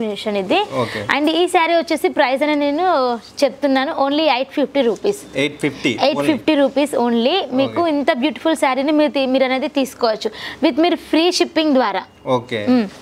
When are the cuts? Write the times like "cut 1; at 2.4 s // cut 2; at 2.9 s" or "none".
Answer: none

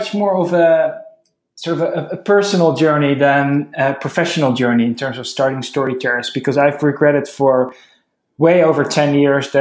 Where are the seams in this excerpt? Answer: none

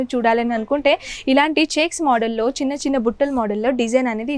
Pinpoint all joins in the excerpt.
none

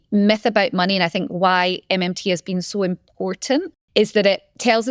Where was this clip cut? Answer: cut 1; at 3.8 s

